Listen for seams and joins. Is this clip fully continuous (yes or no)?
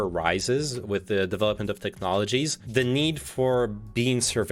no